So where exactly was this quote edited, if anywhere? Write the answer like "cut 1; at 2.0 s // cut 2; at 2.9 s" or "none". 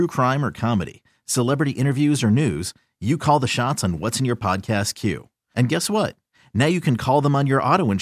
none